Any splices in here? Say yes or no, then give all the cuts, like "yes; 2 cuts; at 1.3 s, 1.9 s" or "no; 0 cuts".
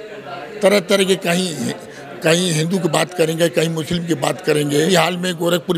yes; 1 cut; at 4.9 s